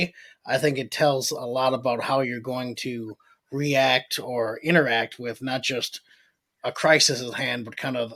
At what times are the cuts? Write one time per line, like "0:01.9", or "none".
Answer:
none